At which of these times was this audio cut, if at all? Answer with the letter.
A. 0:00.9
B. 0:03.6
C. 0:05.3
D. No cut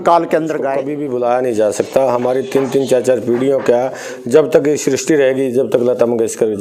A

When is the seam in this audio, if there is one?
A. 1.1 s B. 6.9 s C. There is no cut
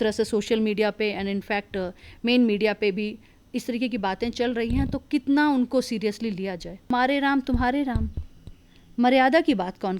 B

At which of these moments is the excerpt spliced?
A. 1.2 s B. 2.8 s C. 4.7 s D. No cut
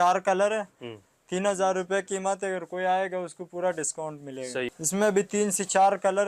C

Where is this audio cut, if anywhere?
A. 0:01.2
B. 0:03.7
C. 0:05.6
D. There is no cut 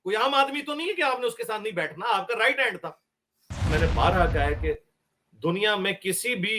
B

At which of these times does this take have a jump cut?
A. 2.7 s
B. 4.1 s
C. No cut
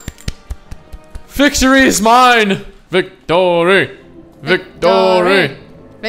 A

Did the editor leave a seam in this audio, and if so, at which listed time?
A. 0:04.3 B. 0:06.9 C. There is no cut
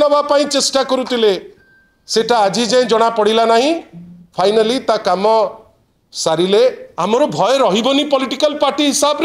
B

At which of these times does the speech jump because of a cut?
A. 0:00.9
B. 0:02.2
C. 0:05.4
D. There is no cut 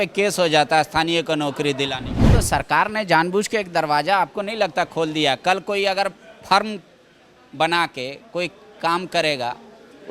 B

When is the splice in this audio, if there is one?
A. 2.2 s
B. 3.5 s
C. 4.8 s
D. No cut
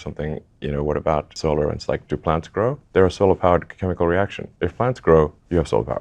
D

